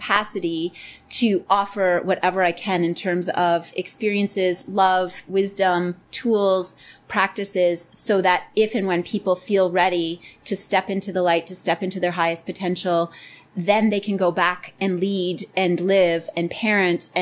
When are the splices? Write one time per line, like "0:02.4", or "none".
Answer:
none